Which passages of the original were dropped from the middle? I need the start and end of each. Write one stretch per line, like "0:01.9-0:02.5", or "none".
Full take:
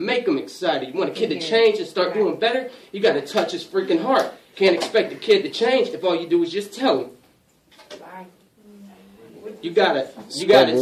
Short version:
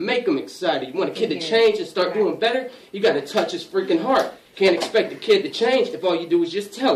none